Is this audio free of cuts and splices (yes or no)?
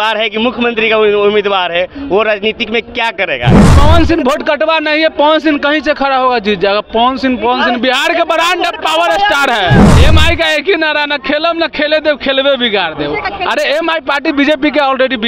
no